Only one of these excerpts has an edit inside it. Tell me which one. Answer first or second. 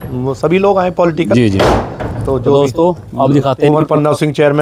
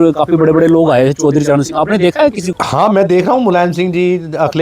second